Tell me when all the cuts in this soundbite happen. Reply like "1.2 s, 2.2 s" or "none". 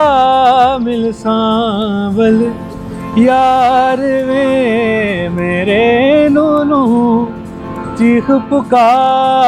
none